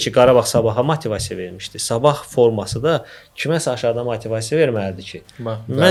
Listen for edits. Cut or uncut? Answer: uncut